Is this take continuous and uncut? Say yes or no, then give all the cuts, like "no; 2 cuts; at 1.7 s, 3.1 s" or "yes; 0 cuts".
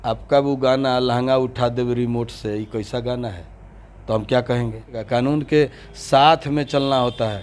no; 1 cut; at 5.0 s